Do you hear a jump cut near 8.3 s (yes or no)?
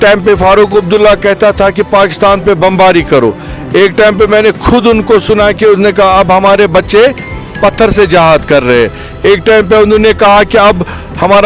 no